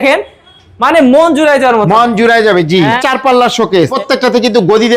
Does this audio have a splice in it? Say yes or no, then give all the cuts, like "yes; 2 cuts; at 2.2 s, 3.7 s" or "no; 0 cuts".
yes; 2 cuts; at 3.0 s, 3.9 s